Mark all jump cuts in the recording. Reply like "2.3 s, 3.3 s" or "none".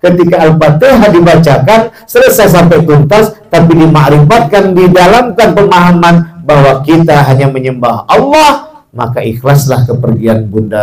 none